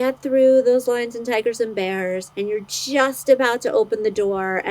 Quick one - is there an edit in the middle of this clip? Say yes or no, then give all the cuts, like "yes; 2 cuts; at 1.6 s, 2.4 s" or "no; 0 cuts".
yes; 1 cut; at 2.3 s